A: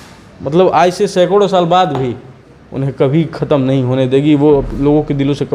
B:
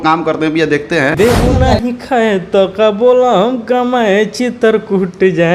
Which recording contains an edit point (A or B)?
B